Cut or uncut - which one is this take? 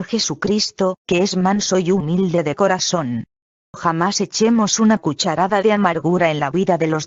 uncut